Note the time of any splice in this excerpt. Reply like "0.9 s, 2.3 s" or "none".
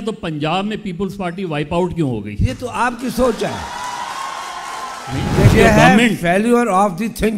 5.5 s